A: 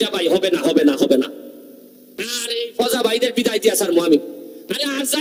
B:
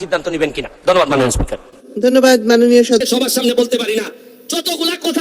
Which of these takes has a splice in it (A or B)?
B